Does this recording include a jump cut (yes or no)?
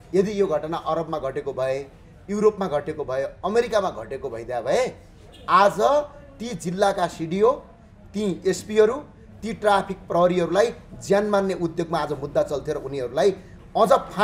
no